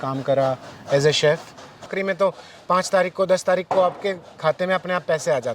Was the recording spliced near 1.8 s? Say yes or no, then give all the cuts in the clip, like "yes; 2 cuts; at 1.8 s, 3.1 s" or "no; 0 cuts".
yes; 1 cut; at 1.8 s